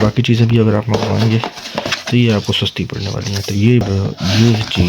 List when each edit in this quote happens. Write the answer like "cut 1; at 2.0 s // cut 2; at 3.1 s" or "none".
cut 1; at 3.8 s